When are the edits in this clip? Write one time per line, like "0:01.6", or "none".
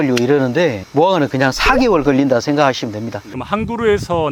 none